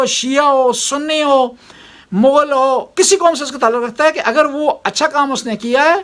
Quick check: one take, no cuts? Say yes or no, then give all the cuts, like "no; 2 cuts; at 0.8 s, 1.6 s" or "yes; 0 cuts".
yes; 0 cuts